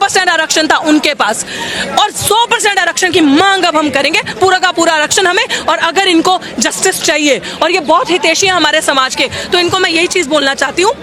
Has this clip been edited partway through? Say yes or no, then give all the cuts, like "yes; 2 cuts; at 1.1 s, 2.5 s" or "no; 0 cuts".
no; 0 cuts